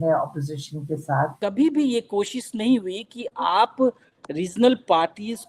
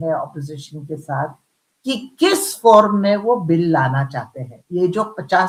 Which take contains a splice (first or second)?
first